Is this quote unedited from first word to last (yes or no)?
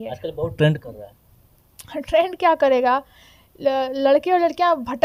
yes